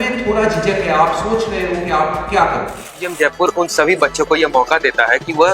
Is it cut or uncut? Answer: cut